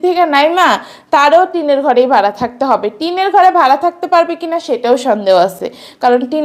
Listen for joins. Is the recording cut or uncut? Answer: uncut